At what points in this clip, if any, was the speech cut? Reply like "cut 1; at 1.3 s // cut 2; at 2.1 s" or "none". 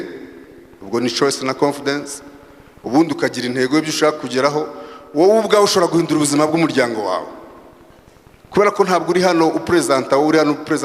none